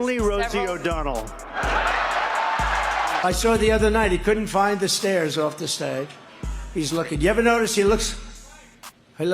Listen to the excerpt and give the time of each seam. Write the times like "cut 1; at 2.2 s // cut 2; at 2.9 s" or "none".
cut 1; at 3.2 s